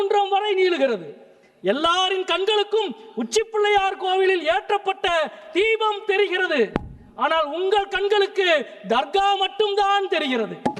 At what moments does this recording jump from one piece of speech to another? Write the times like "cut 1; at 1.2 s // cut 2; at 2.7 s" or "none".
none